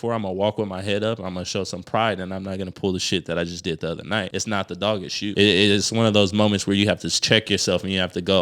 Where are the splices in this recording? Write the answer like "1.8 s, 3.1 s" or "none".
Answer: 4.3 s, 5.3 s

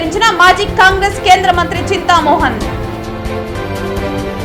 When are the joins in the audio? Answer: none

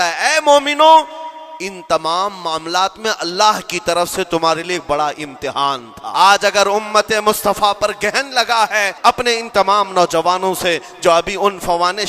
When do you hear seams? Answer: 6.0 s, 8.9 s

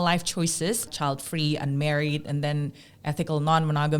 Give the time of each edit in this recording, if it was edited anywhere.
0.9 s

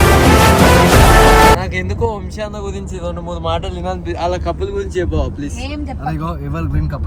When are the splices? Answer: 1.6 s

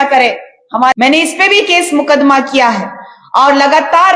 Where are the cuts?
0.9 s

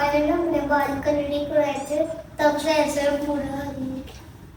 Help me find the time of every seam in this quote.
none

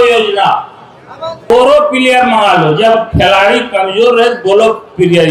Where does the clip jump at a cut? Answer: 1.5 s

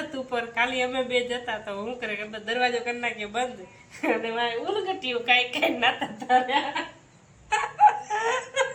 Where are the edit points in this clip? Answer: none

